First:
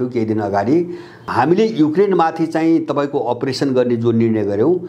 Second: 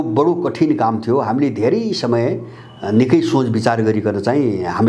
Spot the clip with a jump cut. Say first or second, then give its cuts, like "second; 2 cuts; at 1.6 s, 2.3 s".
first; 1 cut; at 1.3 s